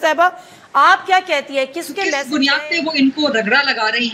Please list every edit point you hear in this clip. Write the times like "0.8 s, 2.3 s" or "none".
2.2 s